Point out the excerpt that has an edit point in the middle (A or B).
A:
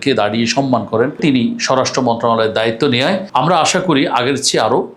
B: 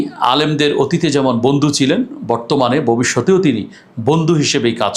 A